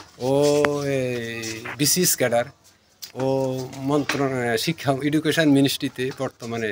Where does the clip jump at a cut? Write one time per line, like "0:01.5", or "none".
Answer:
none

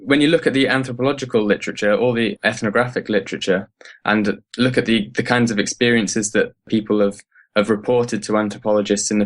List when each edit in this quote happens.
0:02.3
0:06.7

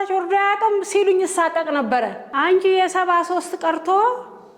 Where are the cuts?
0:02.2

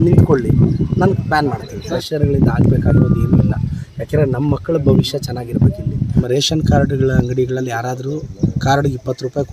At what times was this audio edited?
0:01.7
0:06.3
0:08.3

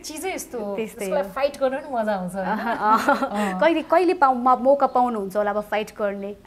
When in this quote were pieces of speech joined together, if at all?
none

